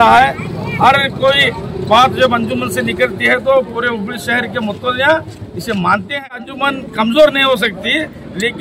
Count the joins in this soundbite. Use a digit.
1